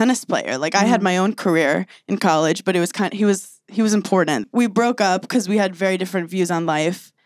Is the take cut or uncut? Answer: cut